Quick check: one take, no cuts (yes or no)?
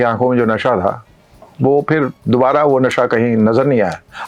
yes